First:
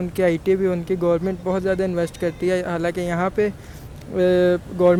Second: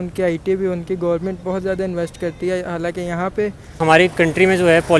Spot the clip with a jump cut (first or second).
second